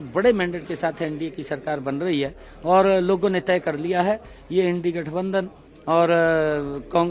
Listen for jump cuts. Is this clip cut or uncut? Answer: uncut